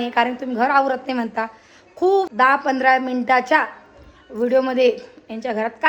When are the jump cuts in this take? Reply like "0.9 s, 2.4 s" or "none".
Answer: 2.3 s